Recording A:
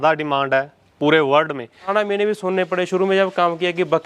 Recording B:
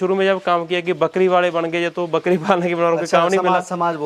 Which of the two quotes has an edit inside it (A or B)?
A